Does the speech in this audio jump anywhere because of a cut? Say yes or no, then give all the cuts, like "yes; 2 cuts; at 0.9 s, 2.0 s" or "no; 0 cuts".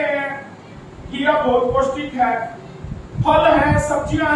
no; 0 cuts